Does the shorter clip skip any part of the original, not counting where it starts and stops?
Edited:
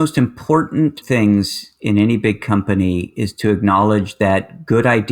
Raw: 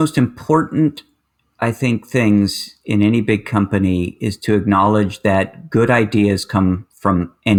yes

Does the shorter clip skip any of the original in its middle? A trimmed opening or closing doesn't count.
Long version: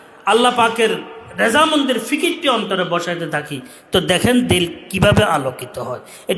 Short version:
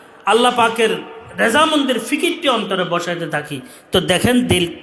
no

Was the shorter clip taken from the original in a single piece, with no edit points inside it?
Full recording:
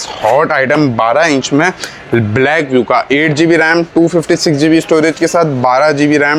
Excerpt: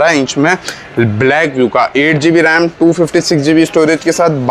yes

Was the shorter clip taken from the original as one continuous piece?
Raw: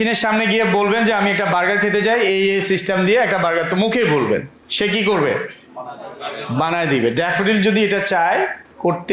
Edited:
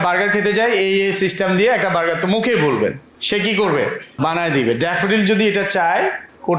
no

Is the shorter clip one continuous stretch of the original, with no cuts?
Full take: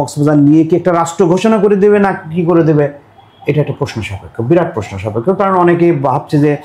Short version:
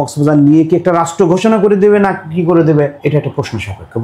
no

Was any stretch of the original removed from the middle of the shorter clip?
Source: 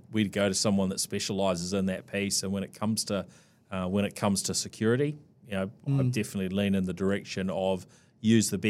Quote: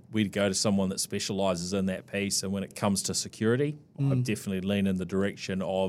yes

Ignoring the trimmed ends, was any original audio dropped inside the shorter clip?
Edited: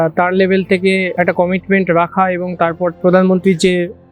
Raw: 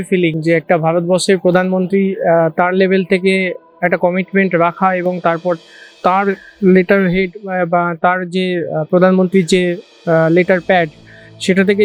yes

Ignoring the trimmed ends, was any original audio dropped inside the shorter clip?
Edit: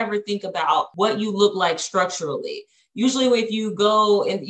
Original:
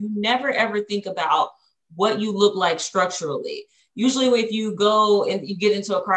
yes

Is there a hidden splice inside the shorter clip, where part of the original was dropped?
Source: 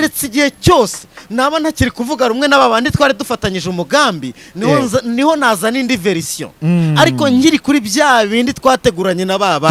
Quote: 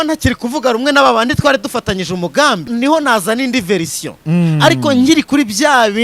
yes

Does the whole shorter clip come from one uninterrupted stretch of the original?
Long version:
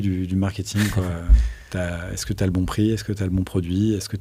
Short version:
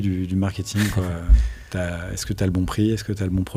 yes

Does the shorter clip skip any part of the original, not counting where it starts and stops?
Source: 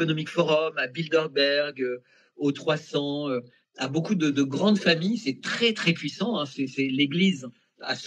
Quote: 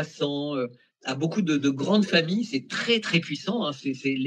no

